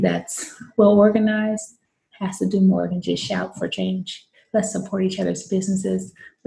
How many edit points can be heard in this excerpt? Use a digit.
1